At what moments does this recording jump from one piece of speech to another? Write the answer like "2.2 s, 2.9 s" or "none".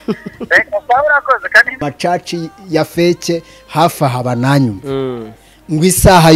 1.8 s